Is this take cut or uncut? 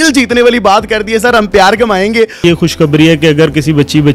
cut